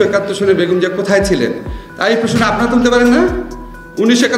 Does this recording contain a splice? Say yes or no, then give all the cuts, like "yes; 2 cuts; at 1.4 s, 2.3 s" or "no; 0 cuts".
no; 0 cuts